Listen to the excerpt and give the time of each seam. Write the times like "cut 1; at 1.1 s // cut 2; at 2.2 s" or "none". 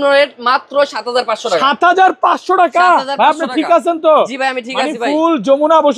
none